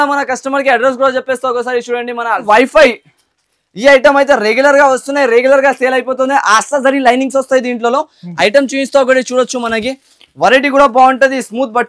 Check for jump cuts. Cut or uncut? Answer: cut